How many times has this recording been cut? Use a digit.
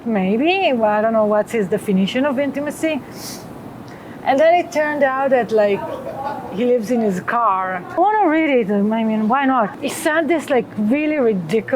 2